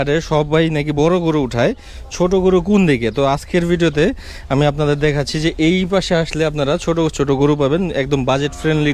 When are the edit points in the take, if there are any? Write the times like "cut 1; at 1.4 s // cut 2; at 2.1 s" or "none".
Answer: none